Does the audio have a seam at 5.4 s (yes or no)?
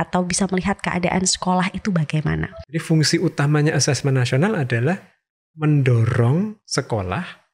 no